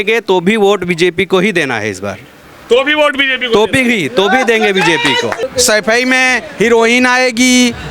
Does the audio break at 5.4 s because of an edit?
yes; 1 cut; at 5.4 s

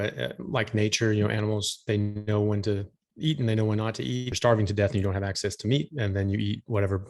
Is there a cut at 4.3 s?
yes; 1 cut; at 4.3 s

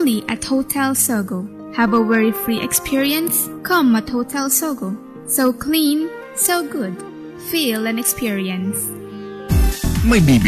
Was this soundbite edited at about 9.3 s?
yes; 1 cut; at 9.3 s

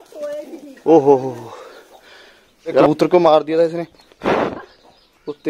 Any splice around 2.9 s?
yes; 1 cut; at 2.9 s

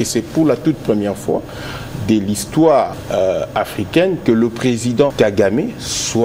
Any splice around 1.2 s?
no; 2 cuts; at 3.0 s, 5.1 s

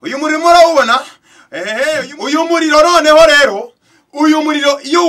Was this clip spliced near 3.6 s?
no; 1 cut; at 1.8 s

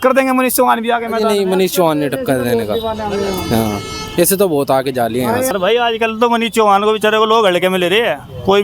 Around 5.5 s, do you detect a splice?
yes; 1 cut; at 5.5 s

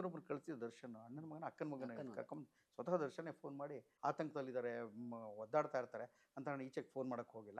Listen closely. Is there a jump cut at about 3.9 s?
yes; 1 cut; at 3.9 s

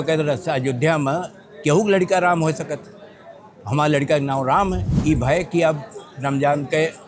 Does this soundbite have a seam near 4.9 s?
yes; 1 cut; at 4.9 s

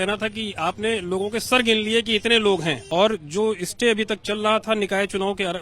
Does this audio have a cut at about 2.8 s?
yes; 1 cut; at 2.8 s

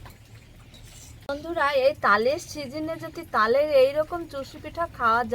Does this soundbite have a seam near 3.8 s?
no; 1 cut; at 1.4 s

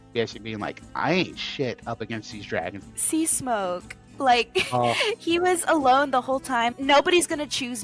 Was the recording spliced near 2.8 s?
yes; 2 cuts; at 2.8 s, 6.7 s

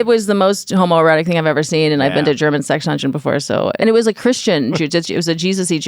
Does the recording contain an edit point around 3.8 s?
yes; 1 cut; at 3.8 s

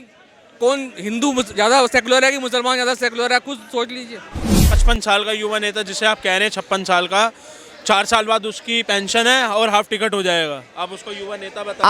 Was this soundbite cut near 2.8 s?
no; 1 cut; at 4.6 s

